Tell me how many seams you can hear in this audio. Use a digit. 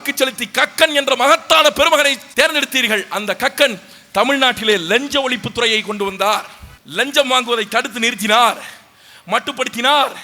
1